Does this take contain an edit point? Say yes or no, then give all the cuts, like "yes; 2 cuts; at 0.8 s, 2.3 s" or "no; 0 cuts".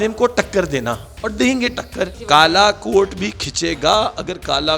yes; 1 cut; at 2.2 s